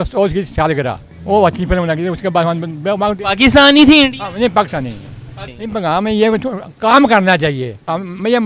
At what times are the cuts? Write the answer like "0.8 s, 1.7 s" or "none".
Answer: 5.4 s